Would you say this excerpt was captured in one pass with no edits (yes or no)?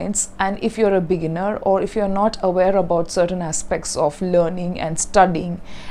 yes